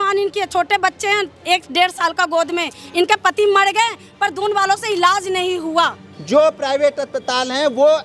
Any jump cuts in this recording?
yes; 1 cut; at 6.1 s

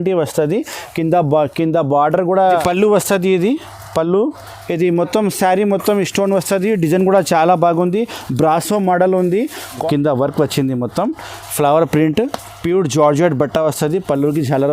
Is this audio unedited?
no; 2 cuts; at 2.5 s, 9.8 s

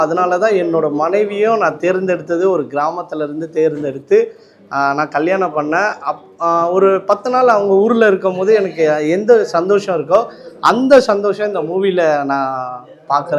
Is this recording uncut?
yes; 0 cuts

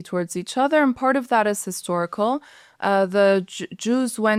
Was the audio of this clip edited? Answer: no; 0 cuts

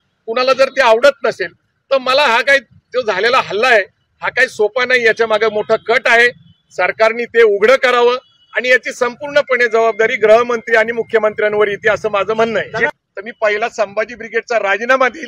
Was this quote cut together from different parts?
yes; 1 cut; at 12.9 s

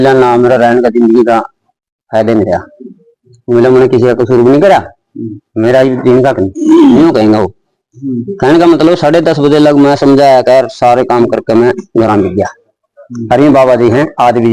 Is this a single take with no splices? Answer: yes; 0 cuts

